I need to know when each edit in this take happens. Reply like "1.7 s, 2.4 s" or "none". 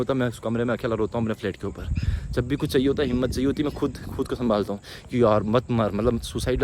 none